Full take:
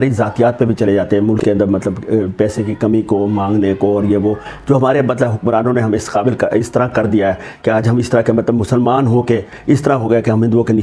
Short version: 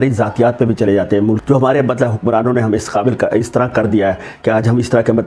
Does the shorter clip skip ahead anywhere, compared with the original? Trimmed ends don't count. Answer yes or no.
yes